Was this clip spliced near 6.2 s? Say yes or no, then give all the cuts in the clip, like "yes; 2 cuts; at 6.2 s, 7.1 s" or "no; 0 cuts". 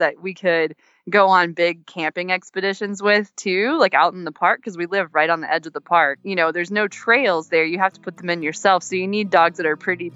yes; 1 cut; at 6.2 s